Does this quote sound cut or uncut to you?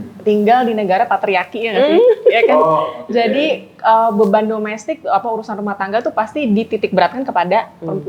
uncut